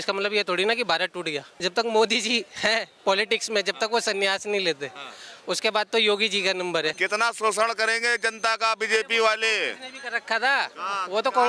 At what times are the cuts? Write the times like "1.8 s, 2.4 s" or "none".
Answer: 1.5 s, 7.0 s